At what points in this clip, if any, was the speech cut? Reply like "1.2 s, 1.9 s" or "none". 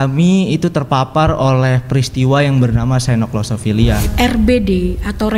4.1 s